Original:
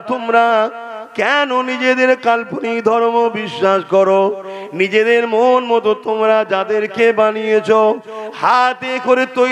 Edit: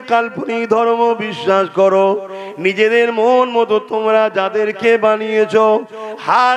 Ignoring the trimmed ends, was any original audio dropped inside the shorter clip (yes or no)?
no